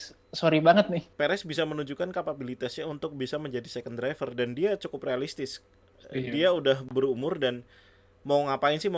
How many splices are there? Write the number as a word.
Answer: one